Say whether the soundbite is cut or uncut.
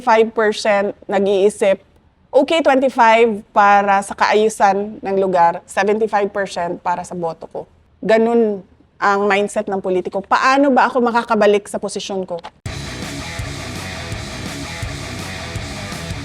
cut